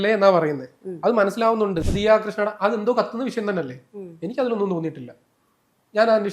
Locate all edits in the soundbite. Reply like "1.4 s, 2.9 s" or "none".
1.9 s